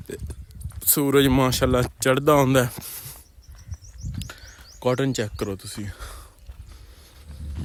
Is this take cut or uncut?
uncut